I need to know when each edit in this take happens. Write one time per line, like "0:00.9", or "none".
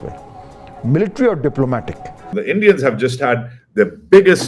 0:02.3